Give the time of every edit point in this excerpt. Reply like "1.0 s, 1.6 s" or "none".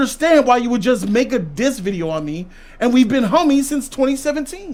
none